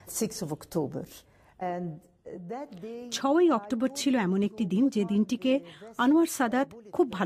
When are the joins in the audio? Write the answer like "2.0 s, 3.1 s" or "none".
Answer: none